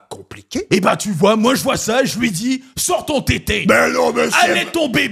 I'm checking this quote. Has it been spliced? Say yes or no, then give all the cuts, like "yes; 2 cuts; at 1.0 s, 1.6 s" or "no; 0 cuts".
no; 0 cuts